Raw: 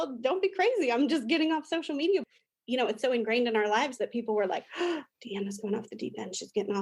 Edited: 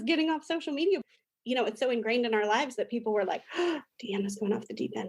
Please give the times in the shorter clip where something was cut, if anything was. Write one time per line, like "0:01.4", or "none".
none